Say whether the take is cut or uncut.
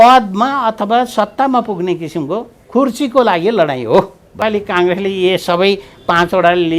cut